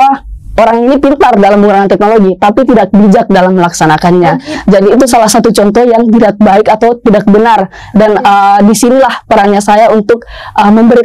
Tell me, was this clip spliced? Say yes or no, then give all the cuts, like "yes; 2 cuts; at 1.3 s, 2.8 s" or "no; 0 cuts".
no; 0 cuts